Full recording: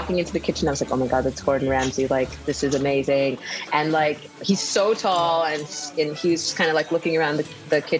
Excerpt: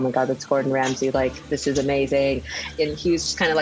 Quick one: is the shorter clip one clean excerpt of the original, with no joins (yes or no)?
no